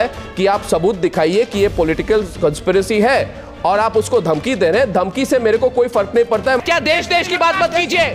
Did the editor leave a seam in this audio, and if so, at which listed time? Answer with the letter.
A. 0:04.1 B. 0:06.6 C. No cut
B